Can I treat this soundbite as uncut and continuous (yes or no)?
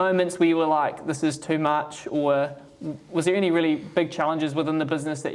yes